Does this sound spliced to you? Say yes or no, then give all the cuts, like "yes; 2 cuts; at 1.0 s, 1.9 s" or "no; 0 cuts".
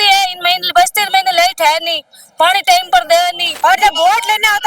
yes; 1 cut; at 3.4 s